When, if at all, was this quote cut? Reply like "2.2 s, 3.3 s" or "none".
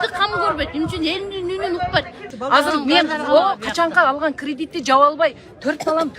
2.2 s